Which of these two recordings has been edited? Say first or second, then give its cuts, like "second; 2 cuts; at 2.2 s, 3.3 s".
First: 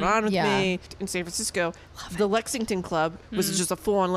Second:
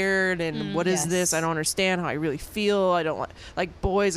first; 2 cuts; at 0.9 s, 3.2 s